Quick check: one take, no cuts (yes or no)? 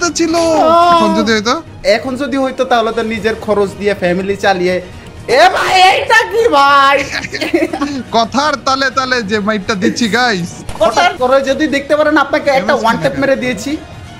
no